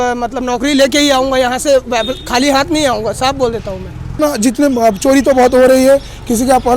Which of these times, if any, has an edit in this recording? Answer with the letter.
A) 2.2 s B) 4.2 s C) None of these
B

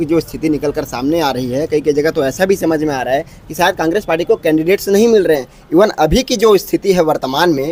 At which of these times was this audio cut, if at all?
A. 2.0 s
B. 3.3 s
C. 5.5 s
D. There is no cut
D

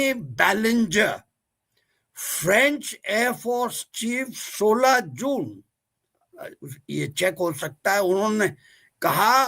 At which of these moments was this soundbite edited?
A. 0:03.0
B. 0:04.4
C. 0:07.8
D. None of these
D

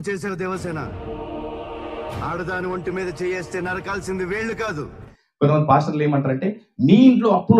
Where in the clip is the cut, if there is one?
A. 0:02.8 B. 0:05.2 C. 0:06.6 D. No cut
B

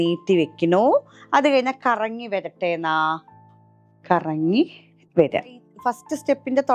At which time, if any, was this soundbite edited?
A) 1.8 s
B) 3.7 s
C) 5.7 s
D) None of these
C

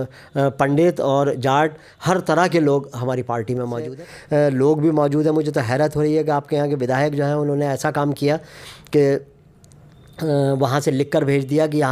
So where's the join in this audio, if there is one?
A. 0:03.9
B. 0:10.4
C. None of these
A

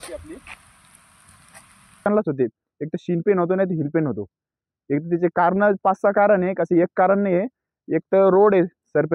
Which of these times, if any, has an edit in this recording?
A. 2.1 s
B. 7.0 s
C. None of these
A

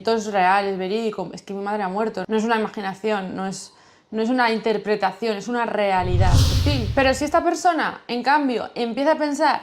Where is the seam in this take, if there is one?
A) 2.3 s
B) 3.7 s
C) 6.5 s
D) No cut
C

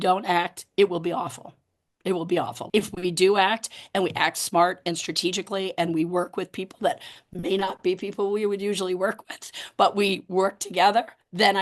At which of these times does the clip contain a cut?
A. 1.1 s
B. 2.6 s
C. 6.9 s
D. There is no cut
B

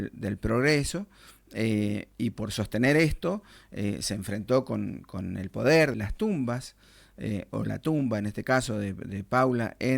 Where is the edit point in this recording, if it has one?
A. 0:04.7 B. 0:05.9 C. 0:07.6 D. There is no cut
B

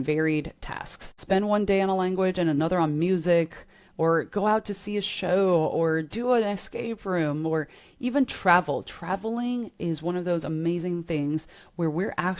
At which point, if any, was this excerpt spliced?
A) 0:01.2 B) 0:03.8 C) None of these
A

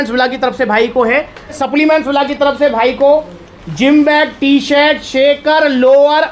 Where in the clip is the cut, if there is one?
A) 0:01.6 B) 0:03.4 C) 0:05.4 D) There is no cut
A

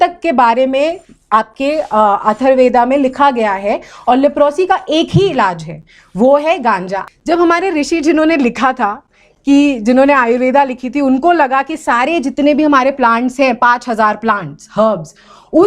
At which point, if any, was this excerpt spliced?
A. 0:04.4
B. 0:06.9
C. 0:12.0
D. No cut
B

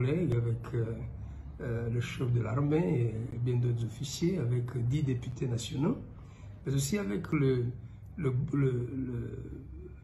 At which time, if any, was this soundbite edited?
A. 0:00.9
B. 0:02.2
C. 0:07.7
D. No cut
D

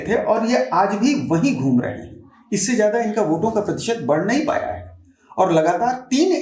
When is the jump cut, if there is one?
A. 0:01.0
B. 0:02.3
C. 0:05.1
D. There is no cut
D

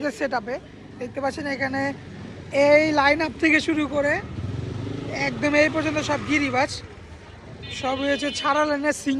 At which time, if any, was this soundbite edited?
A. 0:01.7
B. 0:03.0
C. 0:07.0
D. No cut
D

